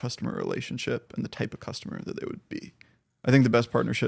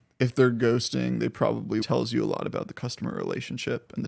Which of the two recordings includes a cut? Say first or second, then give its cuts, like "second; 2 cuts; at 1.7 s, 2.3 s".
second; 1 cut; at 1.8 s